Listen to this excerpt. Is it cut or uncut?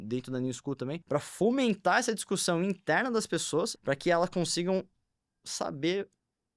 cut